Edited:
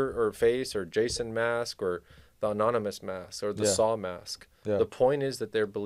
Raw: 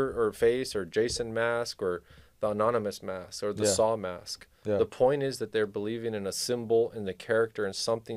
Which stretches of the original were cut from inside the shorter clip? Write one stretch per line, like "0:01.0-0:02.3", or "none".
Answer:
none